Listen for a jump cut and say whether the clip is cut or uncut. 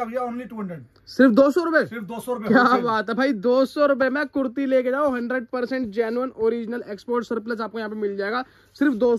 uncut